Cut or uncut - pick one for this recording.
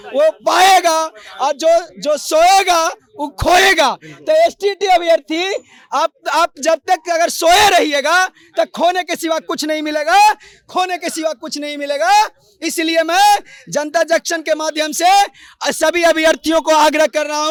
uncut